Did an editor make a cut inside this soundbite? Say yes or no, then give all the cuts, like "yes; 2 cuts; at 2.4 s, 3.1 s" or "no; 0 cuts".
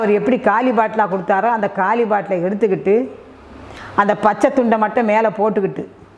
no; 0 cuts